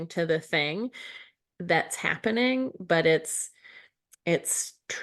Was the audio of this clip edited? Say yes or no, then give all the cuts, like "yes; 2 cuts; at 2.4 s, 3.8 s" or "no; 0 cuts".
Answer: no; 0 cuts